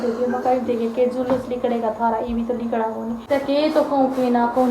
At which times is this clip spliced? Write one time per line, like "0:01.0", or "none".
0:03.2